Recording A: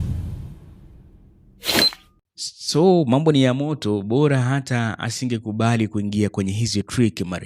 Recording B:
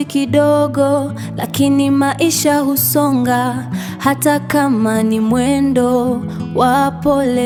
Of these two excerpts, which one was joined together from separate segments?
A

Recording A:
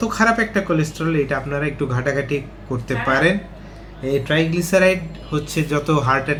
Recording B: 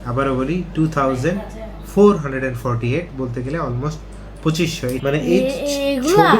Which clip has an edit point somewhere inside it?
B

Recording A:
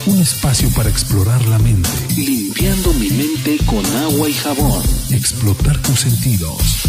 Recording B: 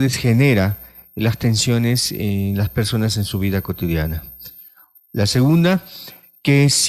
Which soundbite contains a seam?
B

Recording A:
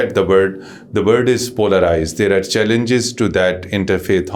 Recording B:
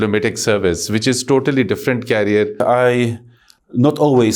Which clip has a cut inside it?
B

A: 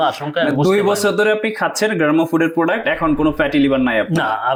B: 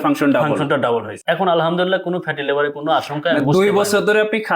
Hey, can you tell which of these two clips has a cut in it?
B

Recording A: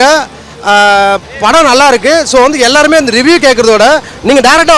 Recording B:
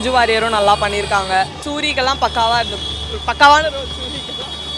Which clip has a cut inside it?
B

